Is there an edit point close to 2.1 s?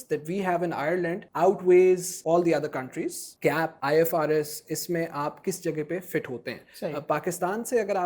yes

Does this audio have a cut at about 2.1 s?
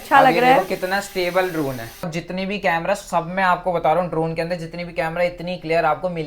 yes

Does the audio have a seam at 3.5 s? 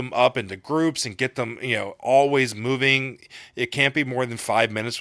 no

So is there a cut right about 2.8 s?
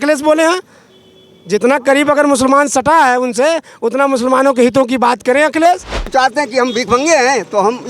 no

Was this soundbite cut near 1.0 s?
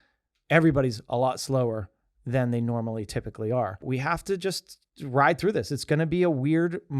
no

